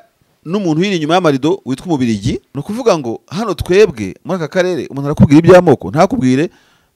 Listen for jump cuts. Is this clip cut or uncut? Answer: cut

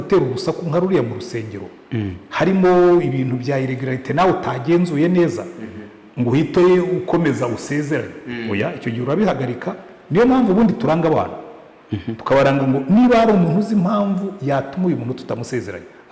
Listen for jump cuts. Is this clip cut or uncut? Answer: uncut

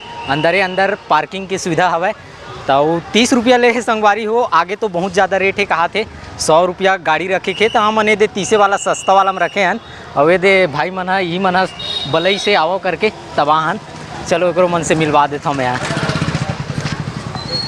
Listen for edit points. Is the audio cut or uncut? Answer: uncut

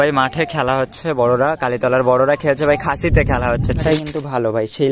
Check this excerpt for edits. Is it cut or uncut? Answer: cut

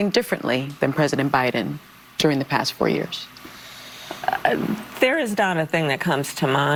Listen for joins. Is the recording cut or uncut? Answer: uncut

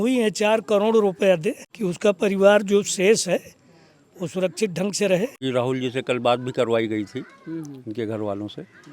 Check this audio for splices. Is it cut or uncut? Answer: cut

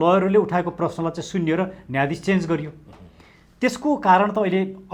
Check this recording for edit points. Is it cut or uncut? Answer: uncut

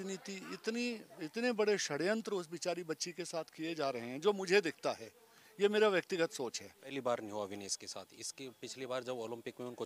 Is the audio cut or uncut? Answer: cut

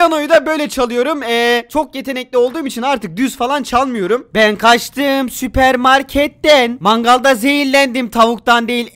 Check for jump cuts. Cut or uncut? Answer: uncut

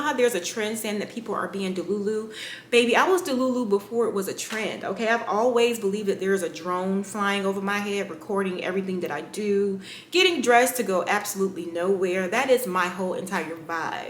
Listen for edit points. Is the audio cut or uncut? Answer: uncut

